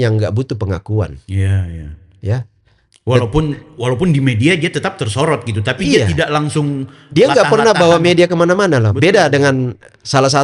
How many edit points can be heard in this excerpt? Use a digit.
0